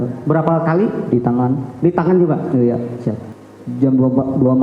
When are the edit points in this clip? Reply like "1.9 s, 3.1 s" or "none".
3.3 s